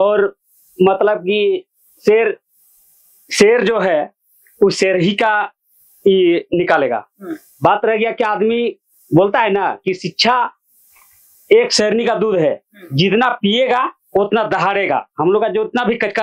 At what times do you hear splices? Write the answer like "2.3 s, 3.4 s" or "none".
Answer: none